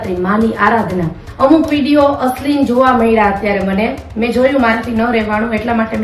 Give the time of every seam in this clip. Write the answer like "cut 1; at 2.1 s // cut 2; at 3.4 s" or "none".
cut 1; at 1.2 s